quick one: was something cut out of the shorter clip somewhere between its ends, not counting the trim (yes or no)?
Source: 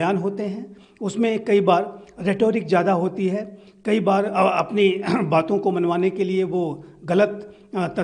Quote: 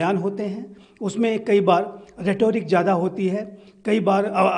no